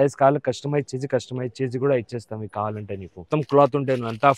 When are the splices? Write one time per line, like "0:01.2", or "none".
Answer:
0:03.2